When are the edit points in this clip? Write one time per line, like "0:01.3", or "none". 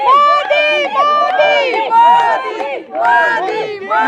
none